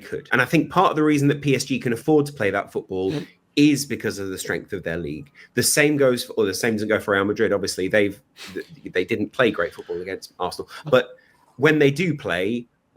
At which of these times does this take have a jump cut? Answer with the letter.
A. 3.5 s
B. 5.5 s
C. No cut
B